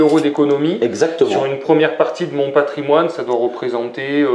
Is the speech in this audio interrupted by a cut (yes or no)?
no